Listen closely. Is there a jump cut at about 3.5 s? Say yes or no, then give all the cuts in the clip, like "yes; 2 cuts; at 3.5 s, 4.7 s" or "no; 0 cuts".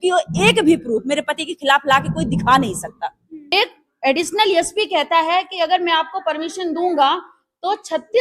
yes; 1 cut; at 3.5 s